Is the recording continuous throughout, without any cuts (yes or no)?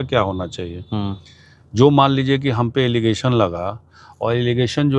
yes